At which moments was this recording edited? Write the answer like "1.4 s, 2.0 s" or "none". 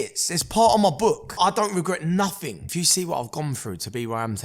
1.4 s, 2.6 s